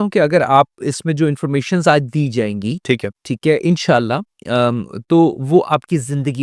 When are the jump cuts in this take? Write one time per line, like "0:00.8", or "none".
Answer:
none